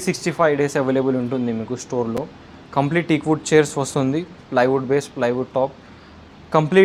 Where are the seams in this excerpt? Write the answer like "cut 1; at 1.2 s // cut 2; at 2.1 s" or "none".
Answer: none